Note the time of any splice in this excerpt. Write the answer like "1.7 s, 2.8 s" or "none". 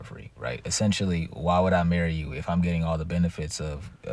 1.4 s